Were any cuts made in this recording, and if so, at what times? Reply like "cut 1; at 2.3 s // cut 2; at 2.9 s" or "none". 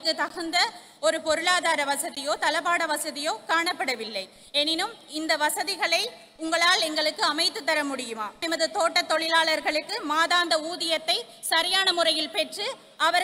cut 1; at 8.4 s